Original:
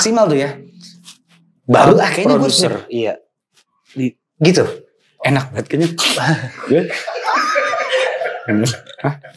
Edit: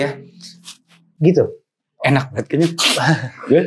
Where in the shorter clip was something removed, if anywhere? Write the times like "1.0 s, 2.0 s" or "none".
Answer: 1.1 s